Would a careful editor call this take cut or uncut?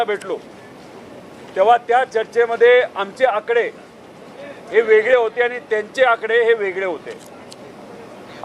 uncut